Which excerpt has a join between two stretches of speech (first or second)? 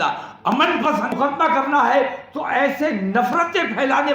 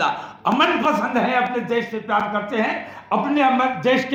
first